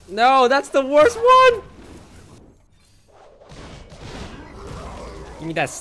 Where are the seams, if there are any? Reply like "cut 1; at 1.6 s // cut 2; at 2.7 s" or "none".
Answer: cut 1; at 2.5 s